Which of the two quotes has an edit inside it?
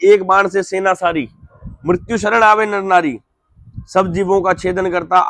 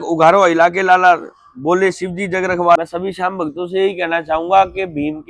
second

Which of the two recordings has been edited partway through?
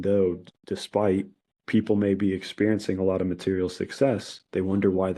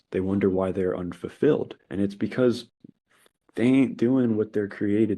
second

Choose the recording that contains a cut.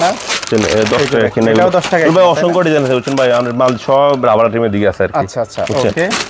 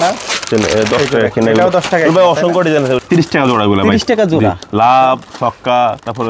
second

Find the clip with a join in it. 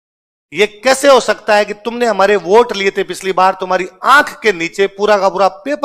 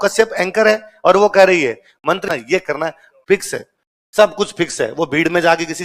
second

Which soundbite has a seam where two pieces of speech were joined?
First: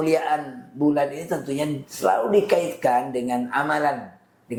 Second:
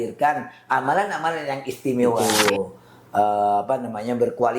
second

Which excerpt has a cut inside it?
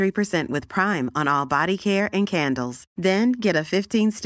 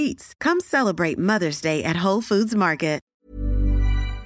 second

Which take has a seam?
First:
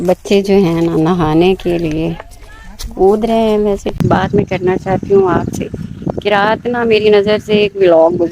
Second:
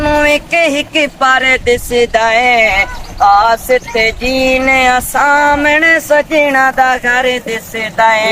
first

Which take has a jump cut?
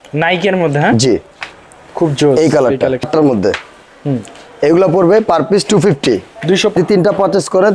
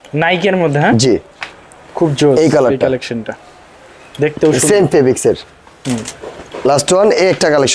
first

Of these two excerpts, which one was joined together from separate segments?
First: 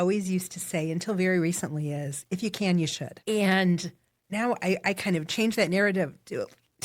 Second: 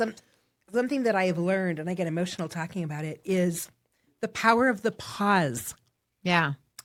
first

